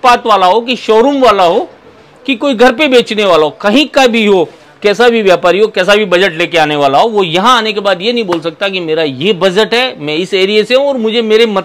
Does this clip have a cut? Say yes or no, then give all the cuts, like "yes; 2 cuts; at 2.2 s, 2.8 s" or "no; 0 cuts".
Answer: no; 0 cuts